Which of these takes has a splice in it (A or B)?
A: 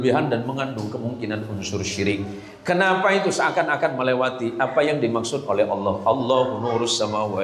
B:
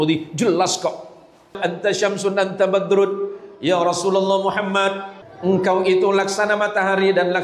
B